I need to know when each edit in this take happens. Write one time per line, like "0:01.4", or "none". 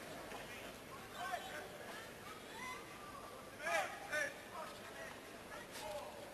0:03.0